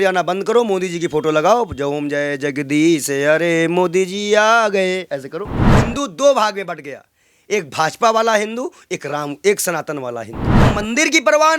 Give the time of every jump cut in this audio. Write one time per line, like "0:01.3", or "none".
0:05.8
0:10.7